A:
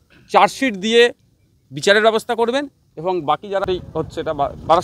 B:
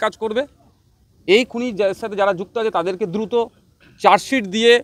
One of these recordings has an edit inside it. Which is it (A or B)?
A